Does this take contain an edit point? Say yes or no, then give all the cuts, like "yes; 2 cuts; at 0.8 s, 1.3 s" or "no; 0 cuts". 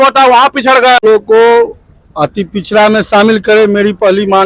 yes; 1 cut; at 1.0 s